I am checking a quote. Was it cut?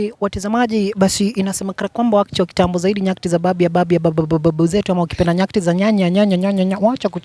no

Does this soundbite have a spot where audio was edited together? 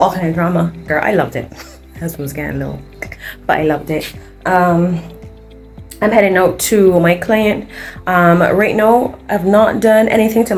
no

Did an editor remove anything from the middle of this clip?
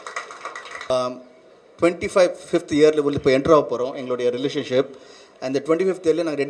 yes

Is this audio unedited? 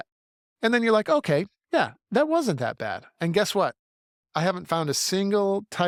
yes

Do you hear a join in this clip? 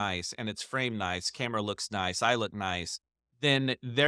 no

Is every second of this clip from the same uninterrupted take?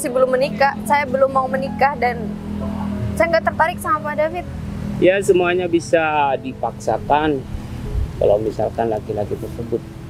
yes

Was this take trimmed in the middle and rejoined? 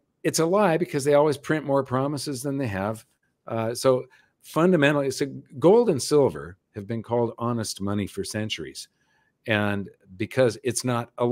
no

